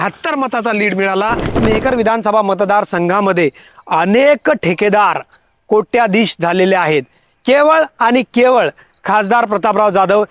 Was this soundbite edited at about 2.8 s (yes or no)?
no